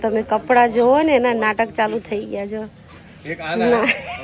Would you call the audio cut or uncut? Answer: uncut